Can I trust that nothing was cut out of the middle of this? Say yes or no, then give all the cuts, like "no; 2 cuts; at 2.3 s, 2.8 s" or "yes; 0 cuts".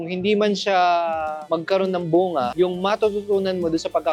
yes; 0 cuts